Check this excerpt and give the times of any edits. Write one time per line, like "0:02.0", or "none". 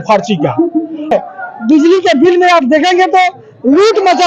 0:01.1